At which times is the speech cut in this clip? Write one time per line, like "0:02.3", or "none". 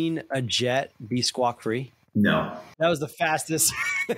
0:02.8